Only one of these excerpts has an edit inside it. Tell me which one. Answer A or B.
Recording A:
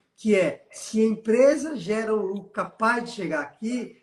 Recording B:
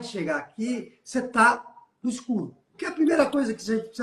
B